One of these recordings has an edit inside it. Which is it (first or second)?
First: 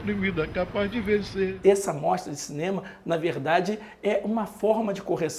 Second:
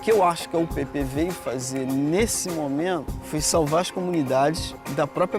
first